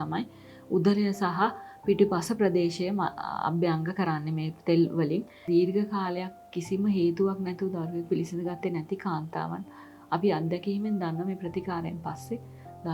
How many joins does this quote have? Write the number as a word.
one